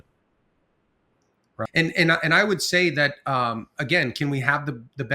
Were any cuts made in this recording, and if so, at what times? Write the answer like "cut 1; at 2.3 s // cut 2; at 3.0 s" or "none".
cut 1; at 1.7 s